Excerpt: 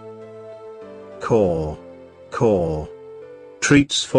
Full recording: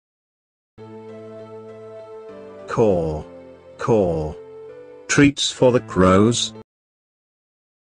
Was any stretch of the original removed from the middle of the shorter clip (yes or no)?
no